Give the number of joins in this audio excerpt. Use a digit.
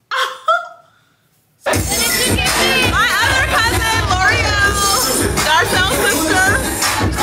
1